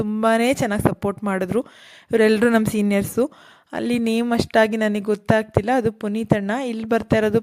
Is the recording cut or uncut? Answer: uncut